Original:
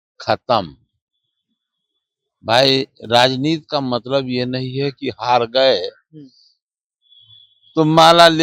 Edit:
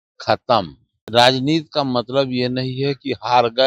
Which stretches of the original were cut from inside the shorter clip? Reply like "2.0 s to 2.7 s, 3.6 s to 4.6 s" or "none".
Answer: 1.0 s to 3.0 s